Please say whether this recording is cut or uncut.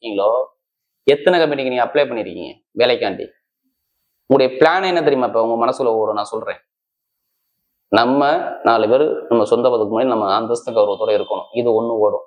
uncut